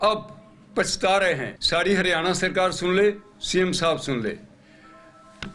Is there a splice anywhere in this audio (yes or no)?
yes